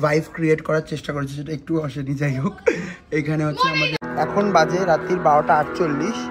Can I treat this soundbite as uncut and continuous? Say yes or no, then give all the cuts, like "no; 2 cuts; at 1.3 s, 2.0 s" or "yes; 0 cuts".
no; 1 cut; at 4.0 s